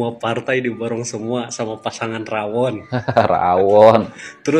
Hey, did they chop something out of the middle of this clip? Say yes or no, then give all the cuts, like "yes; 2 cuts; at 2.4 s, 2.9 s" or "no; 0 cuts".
no; 0 cuts